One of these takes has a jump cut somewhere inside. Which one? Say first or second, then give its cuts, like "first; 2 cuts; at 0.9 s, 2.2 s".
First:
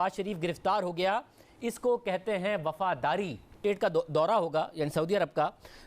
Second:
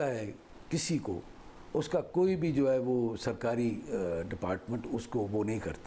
first; 1 cut; at 3.6 s